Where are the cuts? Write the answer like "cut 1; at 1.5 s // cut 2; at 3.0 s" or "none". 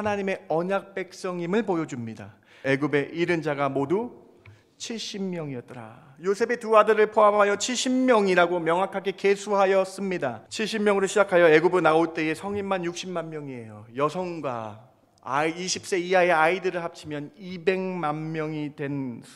cut 1; at 2.6 s // cut 2; at 10.5 s